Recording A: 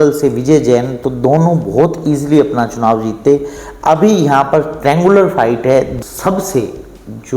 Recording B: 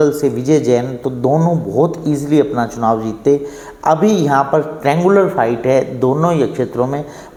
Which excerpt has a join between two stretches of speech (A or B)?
A